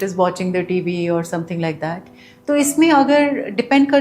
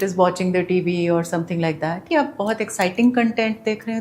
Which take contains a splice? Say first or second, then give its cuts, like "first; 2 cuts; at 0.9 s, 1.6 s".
second; 1 cut; at 2.0 s